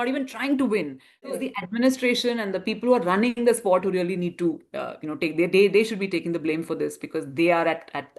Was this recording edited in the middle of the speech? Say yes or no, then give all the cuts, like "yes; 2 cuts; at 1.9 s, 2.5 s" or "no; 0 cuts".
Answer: yes; 1 cut; at 1.3 s